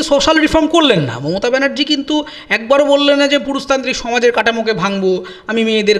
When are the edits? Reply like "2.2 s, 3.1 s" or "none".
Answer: none